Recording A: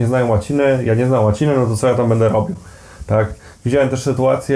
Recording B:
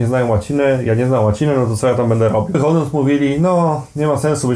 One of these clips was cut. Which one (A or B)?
B